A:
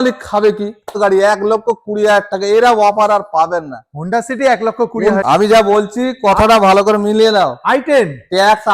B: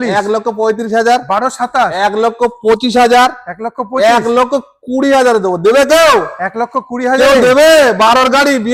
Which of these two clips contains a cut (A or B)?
A